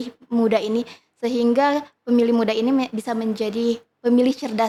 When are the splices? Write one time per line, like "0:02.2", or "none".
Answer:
none